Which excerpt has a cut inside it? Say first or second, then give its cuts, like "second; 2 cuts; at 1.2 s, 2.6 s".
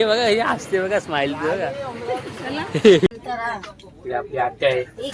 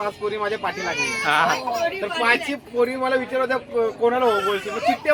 first; 1 cut; at 3.1 s